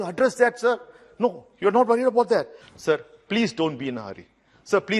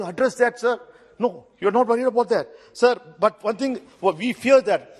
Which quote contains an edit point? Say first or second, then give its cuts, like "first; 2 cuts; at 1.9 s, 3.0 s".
first; 1 cut; at 2.6 s